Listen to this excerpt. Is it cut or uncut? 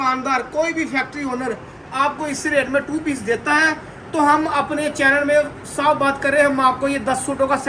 uncut